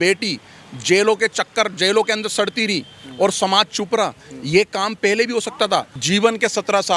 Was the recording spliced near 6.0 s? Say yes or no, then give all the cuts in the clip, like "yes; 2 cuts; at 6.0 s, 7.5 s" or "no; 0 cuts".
yes; 1 cut; at 6.0 s